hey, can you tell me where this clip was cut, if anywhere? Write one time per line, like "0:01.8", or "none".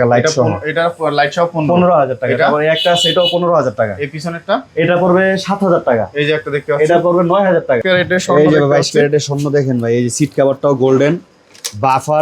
0:07.8